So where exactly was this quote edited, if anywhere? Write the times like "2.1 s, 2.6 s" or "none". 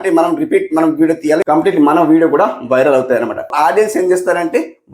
3.5 s

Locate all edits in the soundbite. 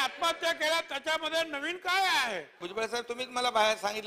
2.7 s

